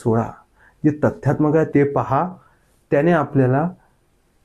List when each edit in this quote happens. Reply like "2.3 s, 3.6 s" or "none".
1.7 s